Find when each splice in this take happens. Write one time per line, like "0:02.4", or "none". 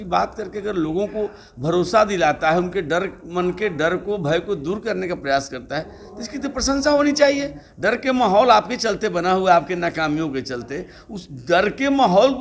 none